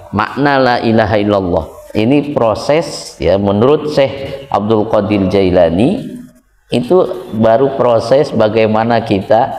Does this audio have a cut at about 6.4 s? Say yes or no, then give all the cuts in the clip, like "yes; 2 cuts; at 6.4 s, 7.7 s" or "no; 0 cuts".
no; 1 cut; at 1.8 s